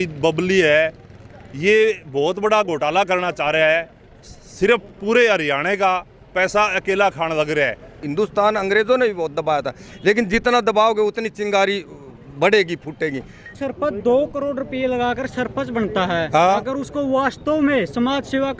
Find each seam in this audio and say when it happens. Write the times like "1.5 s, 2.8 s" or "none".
7.9 s, 13.5 s